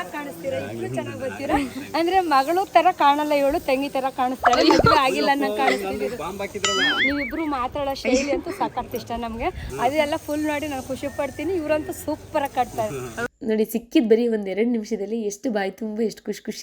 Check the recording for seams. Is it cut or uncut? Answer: cut